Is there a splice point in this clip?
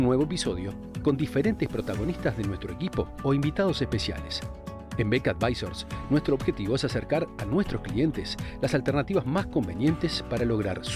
no; 0 cuts

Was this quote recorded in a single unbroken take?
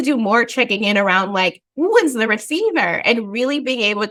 yes; 0 cuts

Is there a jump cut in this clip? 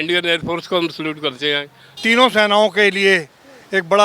yes; 1 cut; at 1.9 s

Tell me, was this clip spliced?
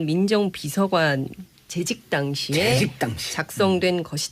no; 0 cuts

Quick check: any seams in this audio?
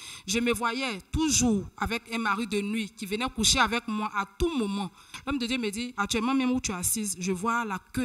yes; 2 cuts; at 5.1 s, 5.9 s

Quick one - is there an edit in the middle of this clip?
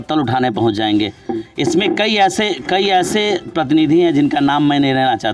no; 0 cuts

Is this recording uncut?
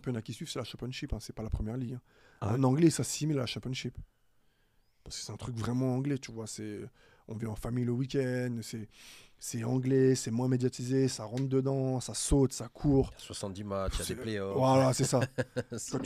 yes; 0 cuts

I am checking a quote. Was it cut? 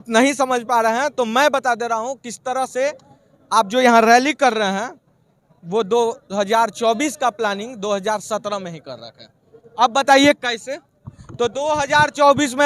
no; 0 cuts

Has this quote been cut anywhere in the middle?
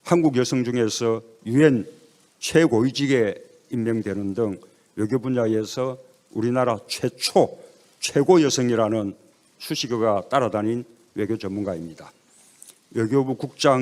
no; 0 cuts

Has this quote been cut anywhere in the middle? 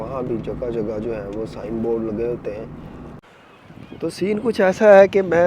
yes; 1 cut; at 3.3 s

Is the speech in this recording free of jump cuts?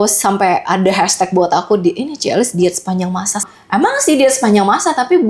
no; 1 cut; at 3.5 s

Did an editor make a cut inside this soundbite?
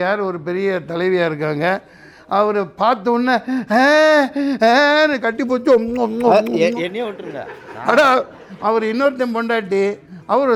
no; 0 cuts

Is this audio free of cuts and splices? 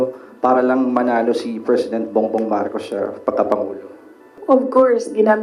no; 1 cut; at 4.3 s

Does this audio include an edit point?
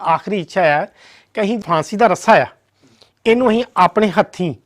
yes; 1 cut; at 1.6 s

